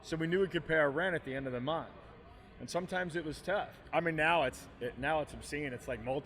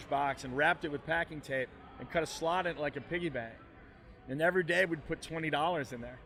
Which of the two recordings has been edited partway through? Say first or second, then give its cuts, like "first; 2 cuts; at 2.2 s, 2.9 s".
first; 1 cut; at 3.8 s